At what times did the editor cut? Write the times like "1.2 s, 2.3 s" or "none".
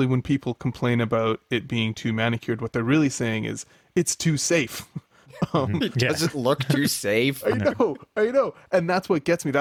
none